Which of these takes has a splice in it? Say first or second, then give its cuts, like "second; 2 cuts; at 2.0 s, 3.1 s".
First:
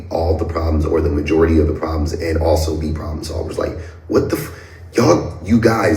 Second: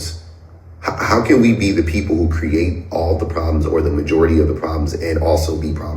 second; 1 cut; at 1.8 s